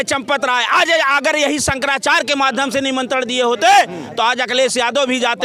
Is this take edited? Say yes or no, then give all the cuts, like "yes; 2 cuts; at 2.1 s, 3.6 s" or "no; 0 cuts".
no; 0 cuts